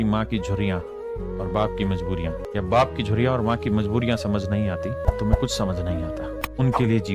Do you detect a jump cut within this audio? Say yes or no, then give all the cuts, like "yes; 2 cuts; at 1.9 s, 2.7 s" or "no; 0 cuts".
no; 0 cuts